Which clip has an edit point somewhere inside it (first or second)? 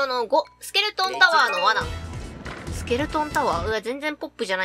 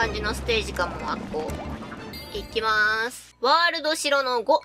second